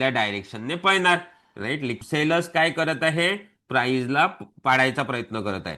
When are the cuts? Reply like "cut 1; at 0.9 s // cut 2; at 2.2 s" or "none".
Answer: cut 1; at 2.0 s